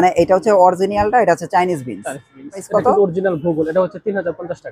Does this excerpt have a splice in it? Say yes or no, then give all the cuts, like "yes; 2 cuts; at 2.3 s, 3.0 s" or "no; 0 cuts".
yes; 1 cut; at 2.7 s